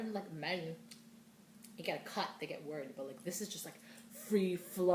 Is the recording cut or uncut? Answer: uncut